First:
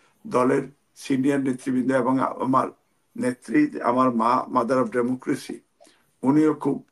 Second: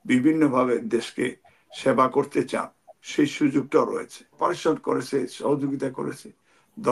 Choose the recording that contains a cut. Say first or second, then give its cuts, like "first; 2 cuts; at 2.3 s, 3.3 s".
second; 1 cut; at 4.4 s